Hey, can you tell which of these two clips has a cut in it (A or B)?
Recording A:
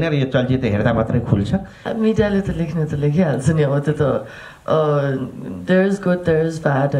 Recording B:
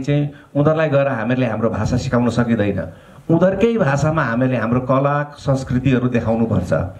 A